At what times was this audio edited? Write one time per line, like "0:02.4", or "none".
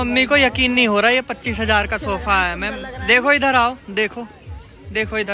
none